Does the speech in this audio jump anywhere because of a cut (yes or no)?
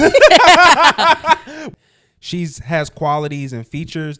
yes